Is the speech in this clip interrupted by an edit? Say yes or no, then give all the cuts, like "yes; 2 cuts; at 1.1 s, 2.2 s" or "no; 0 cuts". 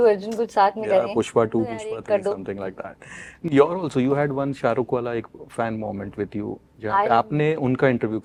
no; 0 cuts